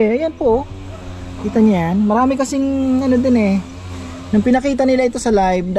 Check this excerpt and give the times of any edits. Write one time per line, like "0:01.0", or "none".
none